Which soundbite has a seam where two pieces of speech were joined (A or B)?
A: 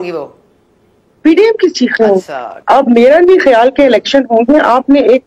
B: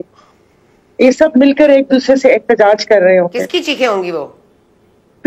A